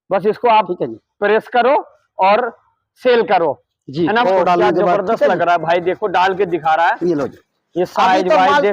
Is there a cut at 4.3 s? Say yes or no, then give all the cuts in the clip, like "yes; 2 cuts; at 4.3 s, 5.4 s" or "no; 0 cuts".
yes; 1 cut; at 4.3 s